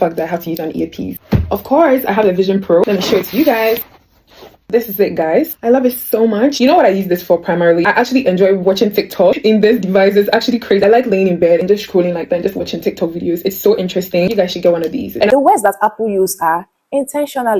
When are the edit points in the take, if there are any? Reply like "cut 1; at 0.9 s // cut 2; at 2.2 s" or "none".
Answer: cut 1; at 15.3 s